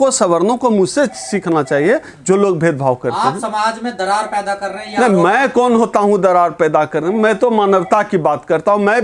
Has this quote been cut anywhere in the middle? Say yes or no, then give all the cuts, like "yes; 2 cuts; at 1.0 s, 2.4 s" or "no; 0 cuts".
no; 0 cuts